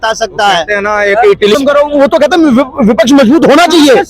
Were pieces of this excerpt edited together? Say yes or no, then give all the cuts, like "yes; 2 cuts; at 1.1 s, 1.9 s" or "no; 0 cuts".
yes; 1 cut; at 1.5 s